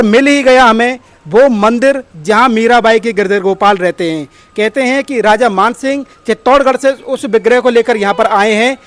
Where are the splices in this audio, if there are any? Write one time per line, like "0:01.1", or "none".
none